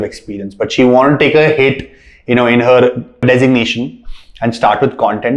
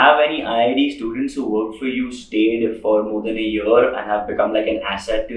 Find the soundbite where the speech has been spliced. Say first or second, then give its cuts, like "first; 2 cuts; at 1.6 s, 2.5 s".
first; 1 cut; at 3.2 s